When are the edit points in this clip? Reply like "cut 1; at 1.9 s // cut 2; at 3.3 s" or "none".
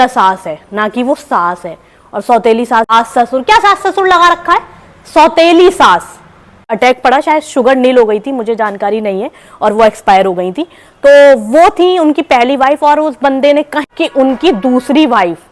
cut 1; at 2.9 s // cut 2; at 6.7 s // cut 3; at 13.8 s

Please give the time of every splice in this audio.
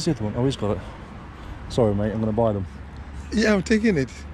none

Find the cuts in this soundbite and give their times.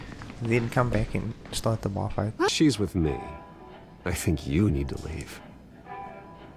cut 1; at 2.5 s

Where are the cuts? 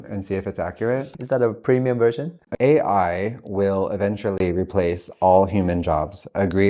cut 1; at 1.1 s // cut 2; at 2.3 s

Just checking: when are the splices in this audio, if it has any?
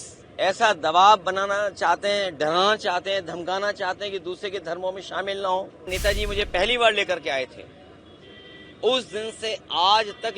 cut 1; at 5.9 s

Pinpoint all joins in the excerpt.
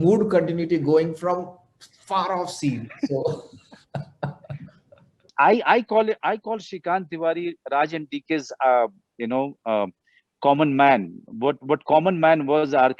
cut 1; at 5.3 s

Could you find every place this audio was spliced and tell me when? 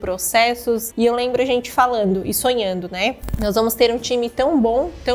cut 1; at 0.9 s // cut 2; at 3.4 s

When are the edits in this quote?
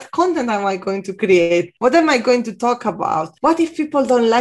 cut 1; at 1.7 s // cut 2; at 3.3 s

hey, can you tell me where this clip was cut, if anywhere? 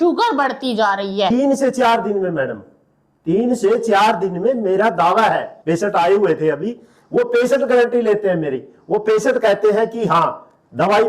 cut 1; at 1.3 s // cut 2; at 5.5 s

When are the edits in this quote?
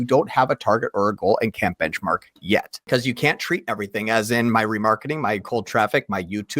cut 1; at 2.8 s

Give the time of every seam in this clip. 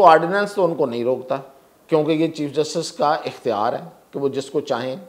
none

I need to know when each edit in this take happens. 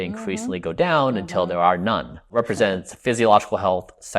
cut 1; at 2.3 s

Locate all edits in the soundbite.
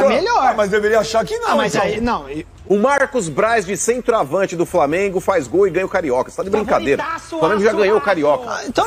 cut 1; at 2.5 s

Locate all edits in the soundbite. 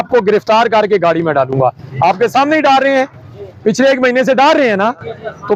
none

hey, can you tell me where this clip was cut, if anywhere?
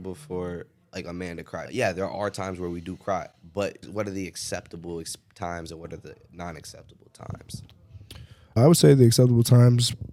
none

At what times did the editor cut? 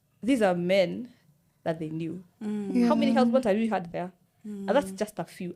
none

